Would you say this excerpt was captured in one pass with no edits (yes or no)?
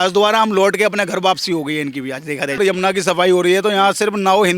no